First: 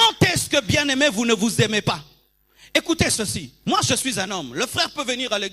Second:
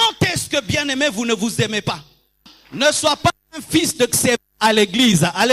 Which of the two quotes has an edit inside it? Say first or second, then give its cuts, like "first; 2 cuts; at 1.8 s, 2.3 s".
second; 1 cut; at 2.5 s